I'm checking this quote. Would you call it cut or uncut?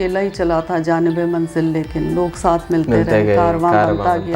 uncut